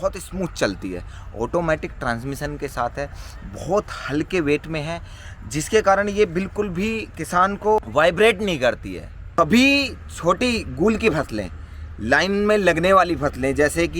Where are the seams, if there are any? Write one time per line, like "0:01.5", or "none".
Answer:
0:07.8
0:09.2